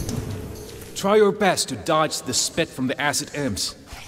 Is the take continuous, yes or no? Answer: no